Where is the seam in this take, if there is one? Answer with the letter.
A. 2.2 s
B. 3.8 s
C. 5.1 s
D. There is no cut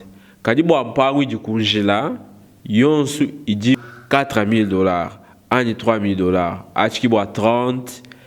B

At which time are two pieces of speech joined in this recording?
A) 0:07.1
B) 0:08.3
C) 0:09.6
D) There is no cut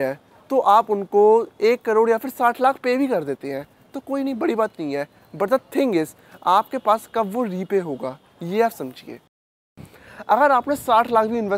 C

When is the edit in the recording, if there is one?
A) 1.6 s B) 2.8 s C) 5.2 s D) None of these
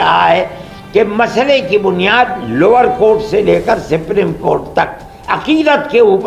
D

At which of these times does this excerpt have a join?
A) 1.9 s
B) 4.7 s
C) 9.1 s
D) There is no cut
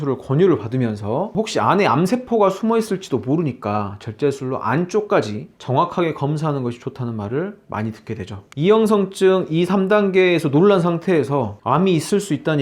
D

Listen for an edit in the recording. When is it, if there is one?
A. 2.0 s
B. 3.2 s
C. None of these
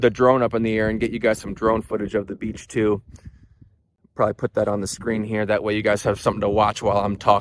C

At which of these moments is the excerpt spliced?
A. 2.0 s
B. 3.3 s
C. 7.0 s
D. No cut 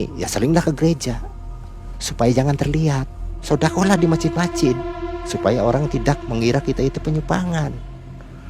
B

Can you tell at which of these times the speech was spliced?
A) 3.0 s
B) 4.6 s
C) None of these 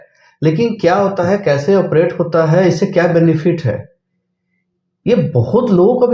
C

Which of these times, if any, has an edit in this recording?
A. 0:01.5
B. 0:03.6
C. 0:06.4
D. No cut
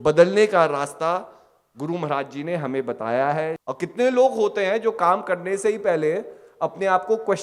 B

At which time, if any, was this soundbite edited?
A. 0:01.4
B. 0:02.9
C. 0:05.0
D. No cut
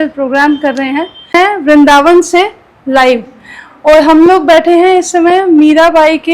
A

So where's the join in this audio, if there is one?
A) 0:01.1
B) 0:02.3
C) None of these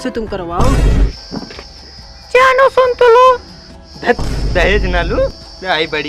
A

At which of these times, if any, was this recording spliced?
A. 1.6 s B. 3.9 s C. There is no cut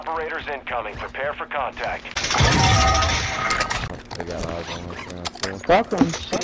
B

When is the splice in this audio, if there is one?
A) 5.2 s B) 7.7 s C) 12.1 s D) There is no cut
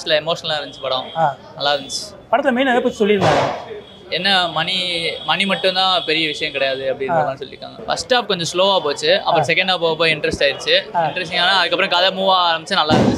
B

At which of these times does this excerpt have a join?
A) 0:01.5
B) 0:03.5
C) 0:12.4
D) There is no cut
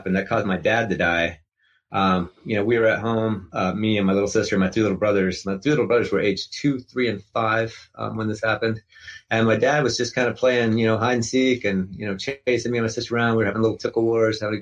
D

